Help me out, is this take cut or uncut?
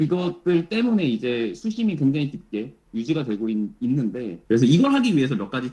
cut